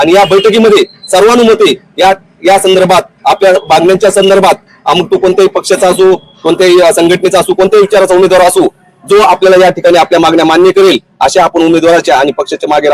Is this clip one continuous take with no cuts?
yes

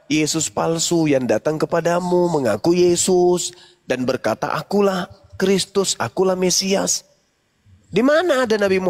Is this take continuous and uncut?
yes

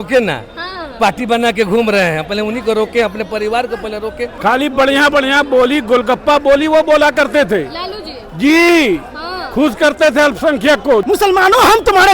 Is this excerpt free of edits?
no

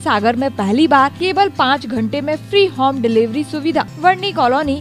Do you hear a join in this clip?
yes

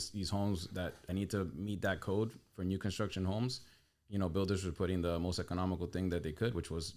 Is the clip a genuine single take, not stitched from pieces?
no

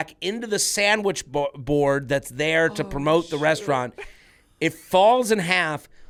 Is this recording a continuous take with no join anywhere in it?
yes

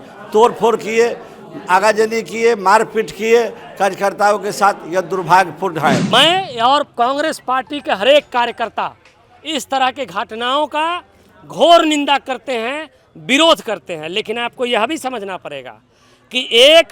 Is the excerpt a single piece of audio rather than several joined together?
no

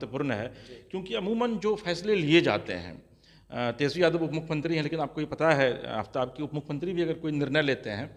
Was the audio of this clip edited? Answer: no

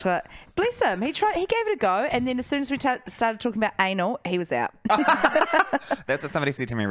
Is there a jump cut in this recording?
no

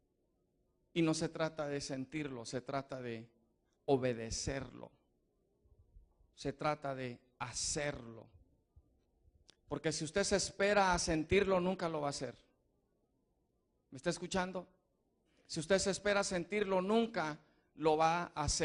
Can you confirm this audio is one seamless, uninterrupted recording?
yes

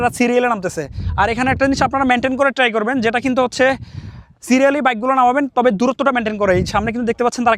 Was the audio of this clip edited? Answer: no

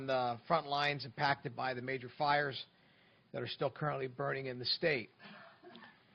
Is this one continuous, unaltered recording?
no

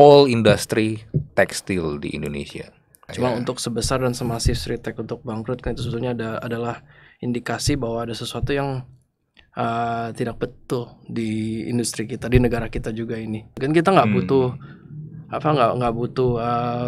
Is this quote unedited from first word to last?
no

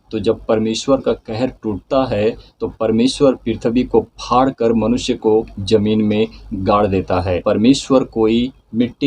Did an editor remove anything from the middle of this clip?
yes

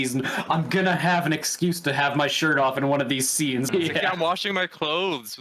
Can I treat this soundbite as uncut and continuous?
no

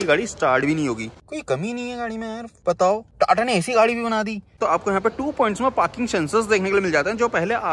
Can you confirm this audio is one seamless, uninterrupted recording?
no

